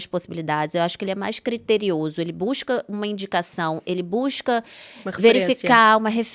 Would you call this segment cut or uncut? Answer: uncut